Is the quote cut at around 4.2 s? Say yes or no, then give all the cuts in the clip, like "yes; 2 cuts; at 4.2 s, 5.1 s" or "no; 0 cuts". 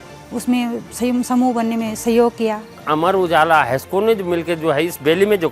no; 1 cut; at 2.7 s